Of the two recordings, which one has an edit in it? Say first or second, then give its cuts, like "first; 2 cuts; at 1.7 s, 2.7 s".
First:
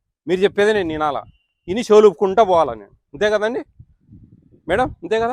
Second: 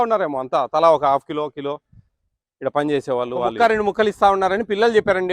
second; 1 cut; at 3.5 s